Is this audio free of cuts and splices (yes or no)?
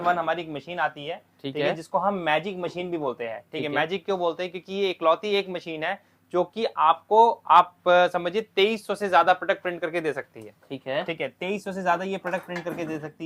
yes